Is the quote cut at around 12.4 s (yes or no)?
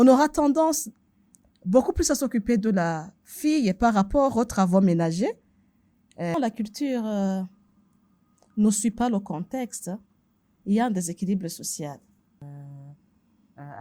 yes